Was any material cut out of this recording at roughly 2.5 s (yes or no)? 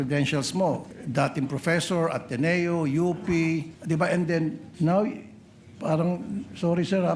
no